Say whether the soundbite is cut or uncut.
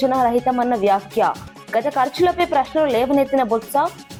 uncut